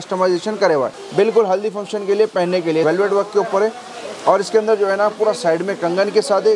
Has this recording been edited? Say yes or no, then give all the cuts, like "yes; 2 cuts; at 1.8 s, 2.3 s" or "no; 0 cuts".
yes; 2 cuts; at 1.0 s, 2.8 s